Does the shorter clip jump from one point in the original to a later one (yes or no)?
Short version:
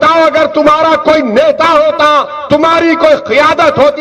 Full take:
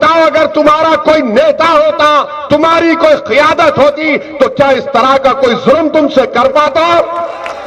no